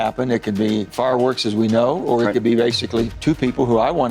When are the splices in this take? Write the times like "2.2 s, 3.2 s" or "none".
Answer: 0.9 s, 3.1 s